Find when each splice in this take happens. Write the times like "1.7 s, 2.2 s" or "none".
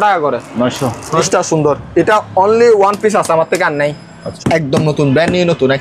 1.2 s, 4.3 s